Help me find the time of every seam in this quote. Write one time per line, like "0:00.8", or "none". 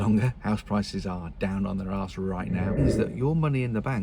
0:02.8